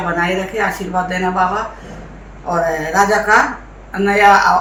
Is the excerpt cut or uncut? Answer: uncut